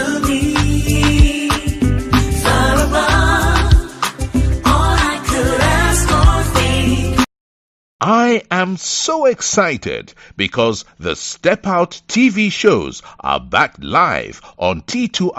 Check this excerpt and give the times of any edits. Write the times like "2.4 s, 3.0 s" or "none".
8.2 s